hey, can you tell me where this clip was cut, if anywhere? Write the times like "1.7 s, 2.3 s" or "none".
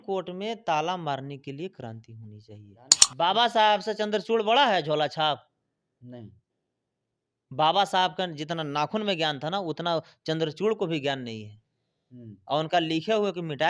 3.0 s